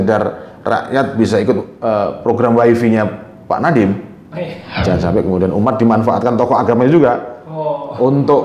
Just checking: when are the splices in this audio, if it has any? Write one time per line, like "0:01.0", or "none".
0:04.6